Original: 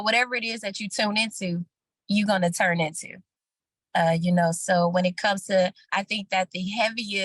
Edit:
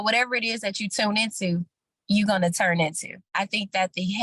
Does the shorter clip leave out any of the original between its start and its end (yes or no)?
yes